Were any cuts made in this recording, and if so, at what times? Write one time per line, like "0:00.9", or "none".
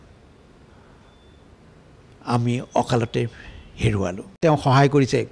0:04.4